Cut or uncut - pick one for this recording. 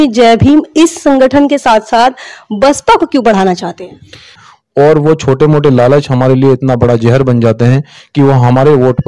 cut